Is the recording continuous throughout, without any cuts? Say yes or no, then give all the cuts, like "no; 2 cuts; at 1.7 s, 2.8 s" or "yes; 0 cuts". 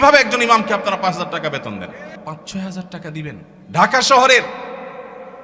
no; 2 cuts; at 2.1 s, 3.5 s